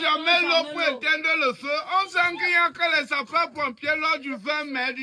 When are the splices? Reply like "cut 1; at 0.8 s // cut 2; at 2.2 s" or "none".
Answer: none